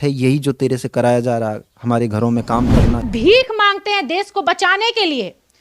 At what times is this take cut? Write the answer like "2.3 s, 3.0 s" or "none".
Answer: 3.1 s